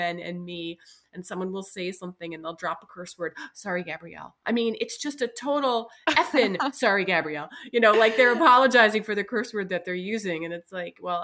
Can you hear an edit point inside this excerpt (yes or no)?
no